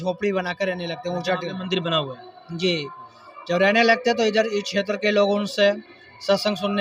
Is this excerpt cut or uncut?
uncut